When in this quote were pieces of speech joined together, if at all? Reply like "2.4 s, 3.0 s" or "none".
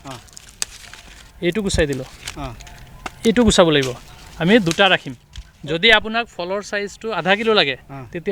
none

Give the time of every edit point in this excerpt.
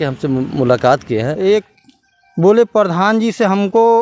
1.3 s

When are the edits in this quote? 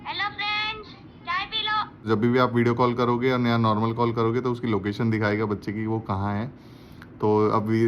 2.0 s

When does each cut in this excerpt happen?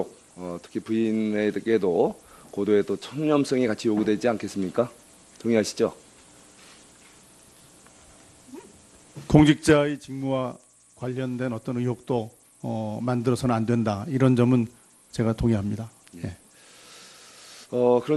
3.7 s

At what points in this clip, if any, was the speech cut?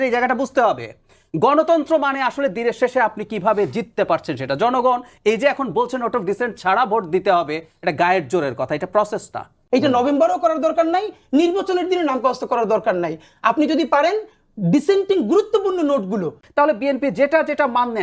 9.5 s, 16.4 s

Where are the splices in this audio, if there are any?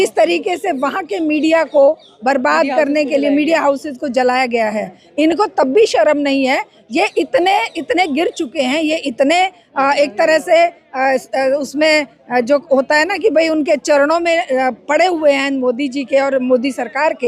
none

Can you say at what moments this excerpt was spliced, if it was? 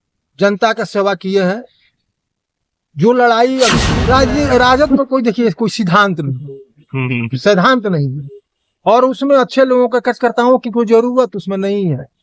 4.1 s

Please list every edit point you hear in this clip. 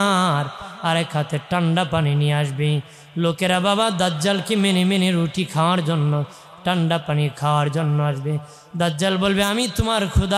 none

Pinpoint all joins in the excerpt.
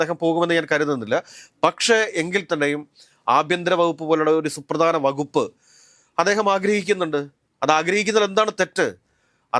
none

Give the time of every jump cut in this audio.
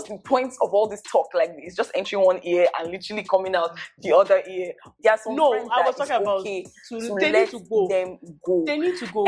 4.8 s

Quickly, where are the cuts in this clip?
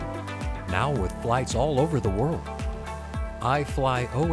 none

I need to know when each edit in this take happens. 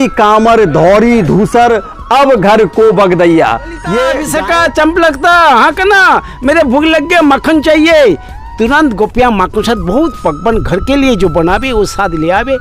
4.2 s

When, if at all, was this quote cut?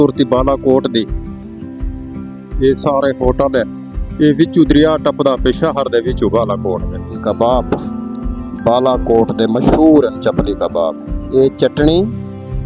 1.1 s, 2.6 s, 7.1 s

